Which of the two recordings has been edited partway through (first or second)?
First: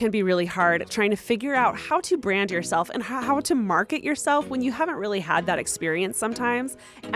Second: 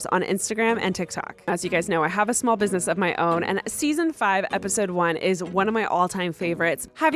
second